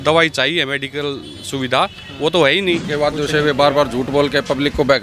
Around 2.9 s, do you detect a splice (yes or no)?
yes